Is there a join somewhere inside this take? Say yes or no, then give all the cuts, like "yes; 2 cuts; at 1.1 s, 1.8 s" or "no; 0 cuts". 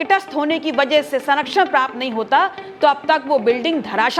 no; 0 cuts